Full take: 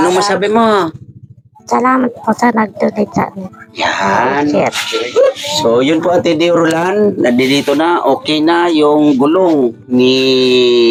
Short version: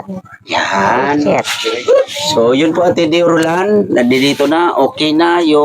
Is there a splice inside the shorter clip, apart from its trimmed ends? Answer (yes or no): no